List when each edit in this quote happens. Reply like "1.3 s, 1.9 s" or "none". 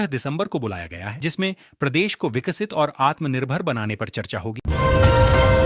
4.5 s